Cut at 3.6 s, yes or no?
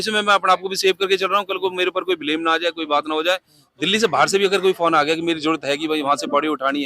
yes